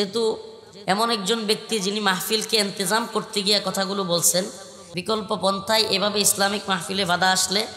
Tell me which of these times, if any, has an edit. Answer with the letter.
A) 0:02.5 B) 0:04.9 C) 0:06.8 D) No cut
B